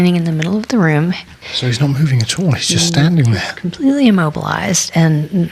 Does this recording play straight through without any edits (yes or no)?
no